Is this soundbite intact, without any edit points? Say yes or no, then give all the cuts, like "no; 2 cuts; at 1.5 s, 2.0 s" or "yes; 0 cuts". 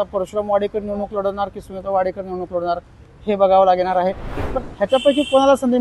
no; 1 cut; at 4.3 s